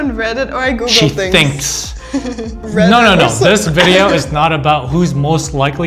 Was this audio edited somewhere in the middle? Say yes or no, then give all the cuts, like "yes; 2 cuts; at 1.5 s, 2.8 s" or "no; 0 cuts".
yes; 1 cut; at 2.6 s